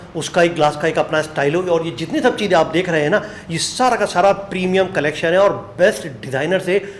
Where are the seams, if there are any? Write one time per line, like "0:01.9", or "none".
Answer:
none